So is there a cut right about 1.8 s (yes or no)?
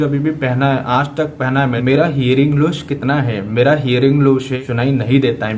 yes